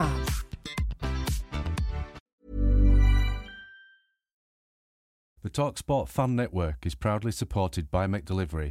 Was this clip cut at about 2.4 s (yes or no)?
no